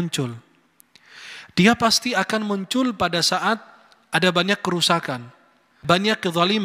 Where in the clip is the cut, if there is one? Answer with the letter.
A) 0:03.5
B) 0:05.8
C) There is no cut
B